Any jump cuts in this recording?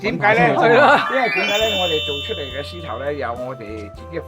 no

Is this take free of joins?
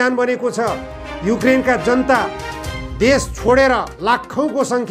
yes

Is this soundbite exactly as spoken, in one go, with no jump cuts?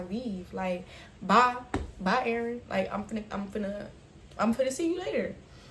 yes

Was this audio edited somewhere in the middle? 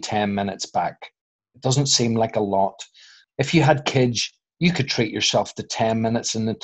yes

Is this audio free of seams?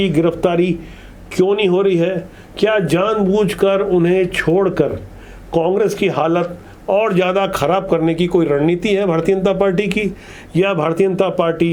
yes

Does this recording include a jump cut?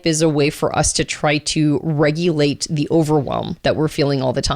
yes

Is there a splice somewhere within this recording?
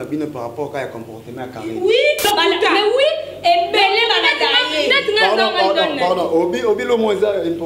yes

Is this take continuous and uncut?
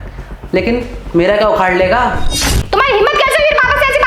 no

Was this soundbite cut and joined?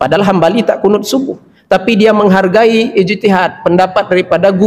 no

